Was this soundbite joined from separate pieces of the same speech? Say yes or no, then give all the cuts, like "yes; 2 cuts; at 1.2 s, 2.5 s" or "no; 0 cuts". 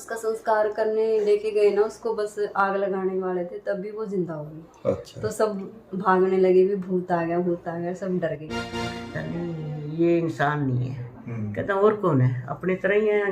yes; 1 cut; at 8.7 s